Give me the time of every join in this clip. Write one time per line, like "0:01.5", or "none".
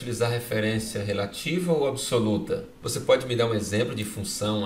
0:02.8